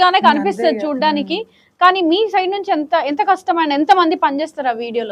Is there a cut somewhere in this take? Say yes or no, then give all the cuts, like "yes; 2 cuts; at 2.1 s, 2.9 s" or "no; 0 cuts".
no; 0 cuts